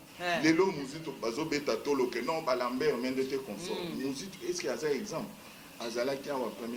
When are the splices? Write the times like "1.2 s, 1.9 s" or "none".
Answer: none